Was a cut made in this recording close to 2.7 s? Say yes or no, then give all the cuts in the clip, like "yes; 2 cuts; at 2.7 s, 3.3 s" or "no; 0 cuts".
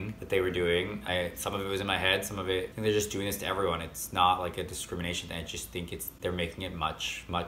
yes; 2 cuts; at 1.0 s, 2.7 s